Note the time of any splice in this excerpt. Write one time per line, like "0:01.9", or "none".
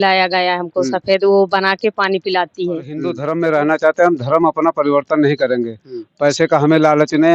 0:03.2